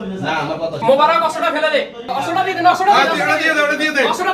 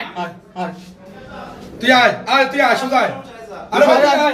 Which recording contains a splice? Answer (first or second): first